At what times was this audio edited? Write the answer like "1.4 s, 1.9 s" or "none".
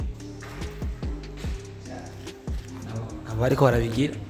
3.3 s